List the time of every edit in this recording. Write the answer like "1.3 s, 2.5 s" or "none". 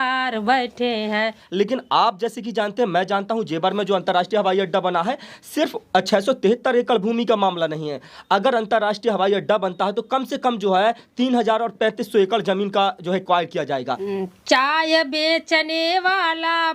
1.4 s, 14.0 s